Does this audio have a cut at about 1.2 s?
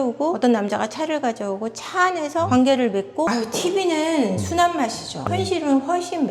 no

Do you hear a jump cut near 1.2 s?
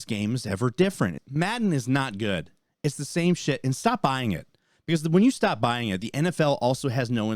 yes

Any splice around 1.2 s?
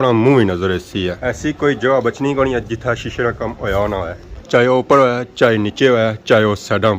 yes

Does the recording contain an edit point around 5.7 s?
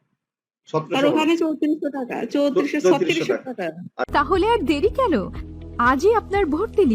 no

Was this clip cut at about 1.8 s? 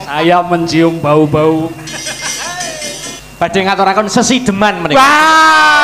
no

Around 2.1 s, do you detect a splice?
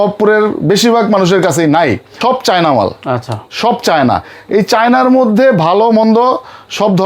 yes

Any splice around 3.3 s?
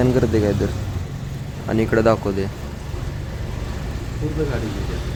no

